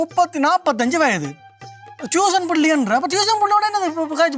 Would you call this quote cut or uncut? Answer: uncut